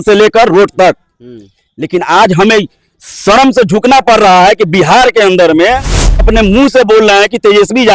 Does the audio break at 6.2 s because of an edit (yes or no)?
yes